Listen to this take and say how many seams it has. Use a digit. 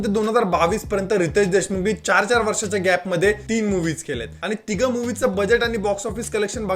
1